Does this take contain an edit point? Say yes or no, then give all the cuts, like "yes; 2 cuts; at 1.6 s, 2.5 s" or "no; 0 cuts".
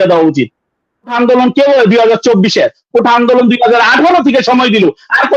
yes; 1 cut; at 1.1 s